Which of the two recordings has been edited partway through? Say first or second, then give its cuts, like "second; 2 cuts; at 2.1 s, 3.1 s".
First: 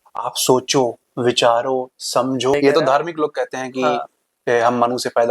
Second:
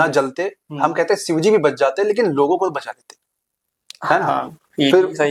first; 1 cut; at 2.5 s